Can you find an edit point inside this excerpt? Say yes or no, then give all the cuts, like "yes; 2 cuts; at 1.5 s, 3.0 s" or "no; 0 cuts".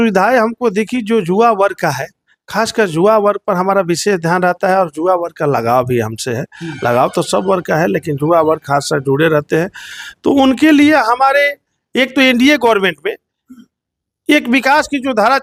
no; 0 cuts